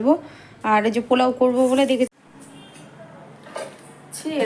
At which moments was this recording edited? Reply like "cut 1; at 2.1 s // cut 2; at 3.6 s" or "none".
cut 1; at 2.1 s